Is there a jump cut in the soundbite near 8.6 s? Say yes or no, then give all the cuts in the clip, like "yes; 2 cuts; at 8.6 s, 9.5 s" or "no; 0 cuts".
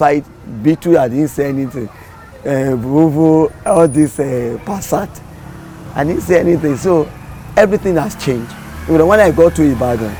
no; 0 cuts